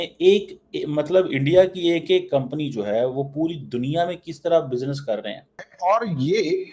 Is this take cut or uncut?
cut